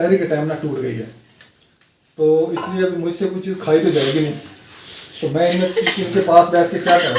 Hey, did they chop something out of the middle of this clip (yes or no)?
no